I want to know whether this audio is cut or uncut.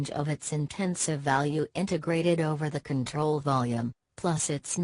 uncut